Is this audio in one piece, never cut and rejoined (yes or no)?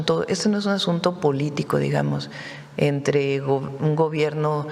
yes